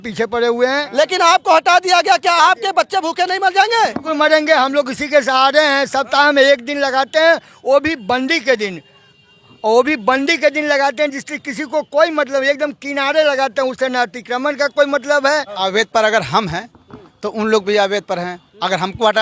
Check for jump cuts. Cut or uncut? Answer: cut